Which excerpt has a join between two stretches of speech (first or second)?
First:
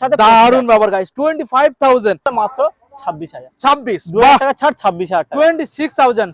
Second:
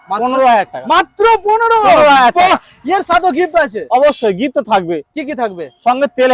first